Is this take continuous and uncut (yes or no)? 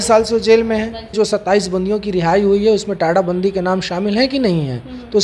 no